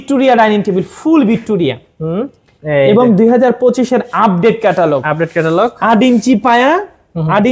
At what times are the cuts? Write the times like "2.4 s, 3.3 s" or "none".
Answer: none